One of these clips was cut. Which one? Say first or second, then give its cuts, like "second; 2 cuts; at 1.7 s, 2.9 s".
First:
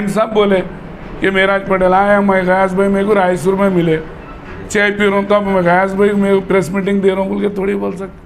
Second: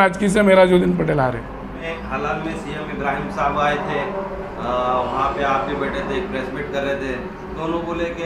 second; 1 cut; at 1.9 s